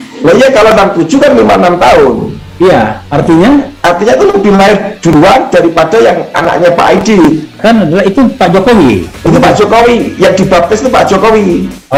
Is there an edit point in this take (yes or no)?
no